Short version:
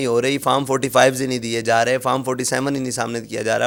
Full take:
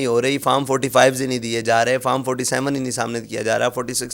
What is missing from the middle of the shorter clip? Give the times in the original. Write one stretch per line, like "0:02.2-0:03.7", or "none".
none